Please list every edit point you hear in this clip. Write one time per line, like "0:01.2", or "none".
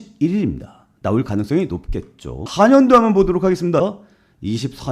0:03.8